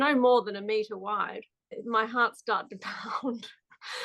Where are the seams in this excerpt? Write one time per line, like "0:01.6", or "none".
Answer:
0:01.8